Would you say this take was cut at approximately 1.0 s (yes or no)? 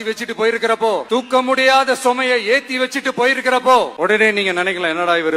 yes